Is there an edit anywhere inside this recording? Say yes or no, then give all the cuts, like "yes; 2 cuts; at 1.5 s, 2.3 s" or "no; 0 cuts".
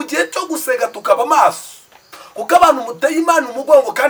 no; 0 cuts